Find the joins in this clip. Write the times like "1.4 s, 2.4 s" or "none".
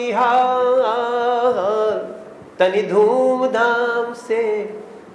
none